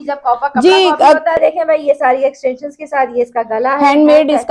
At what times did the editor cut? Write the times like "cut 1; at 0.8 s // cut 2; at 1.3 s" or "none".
cut 1; at 1.4 s